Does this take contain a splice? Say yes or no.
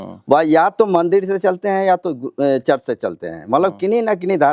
no